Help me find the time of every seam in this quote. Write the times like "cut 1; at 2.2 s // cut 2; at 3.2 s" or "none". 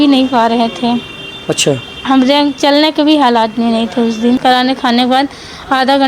cut 1; at 4.2 s

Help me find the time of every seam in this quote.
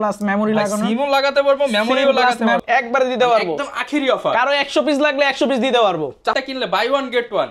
cut 1; at 2.6 s // cut 2; at 6.3 s

